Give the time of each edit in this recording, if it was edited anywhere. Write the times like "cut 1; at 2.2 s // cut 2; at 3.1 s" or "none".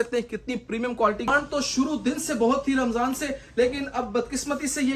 cut 1; at 1.3 s